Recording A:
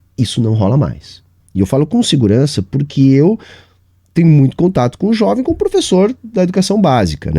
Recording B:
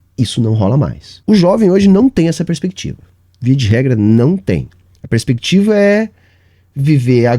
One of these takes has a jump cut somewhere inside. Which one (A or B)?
B